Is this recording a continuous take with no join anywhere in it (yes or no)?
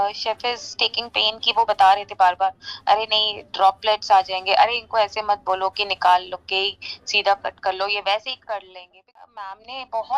no